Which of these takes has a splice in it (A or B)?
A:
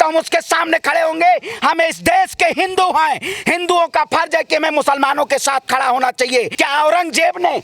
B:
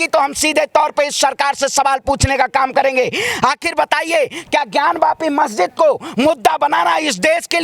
A